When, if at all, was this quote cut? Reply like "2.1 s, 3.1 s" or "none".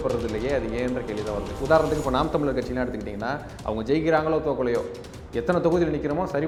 none